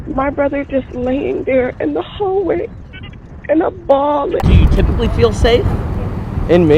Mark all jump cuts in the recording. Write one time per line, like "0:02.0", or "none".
0:04.4